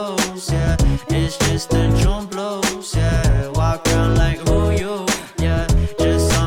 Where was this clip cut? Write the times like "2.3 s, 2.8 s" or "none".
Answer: none